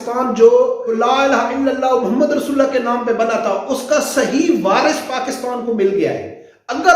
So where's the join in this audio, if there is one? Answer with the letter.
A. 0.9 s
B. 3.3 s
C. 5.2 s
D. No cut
A